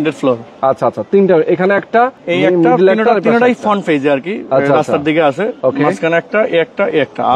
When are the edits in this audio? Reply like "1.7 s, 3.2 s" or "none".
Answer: none